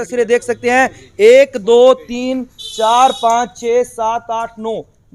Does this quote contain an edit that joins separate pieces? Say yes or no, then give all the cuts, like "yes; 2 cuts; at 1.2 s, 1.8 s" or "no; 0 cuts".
no; 0 cuts